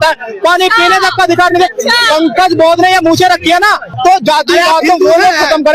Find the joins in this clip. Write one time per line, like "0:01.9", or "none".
0:03.9